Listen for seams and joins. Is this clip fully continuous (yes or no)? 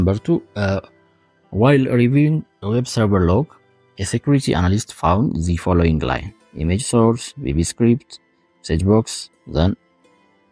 yes